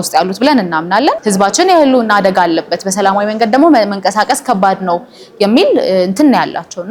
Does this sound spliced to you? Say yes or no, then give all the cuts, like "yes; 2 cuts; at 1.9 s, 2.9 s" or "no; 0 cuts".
yes; 1 cut; at 1.2 s